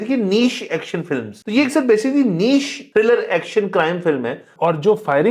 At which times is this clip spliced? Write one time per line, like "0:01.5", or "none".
0:01.3
0:02.8
0:04.5